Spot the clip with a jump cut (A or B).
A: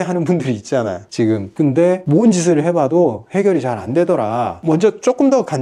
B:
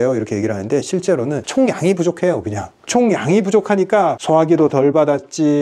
A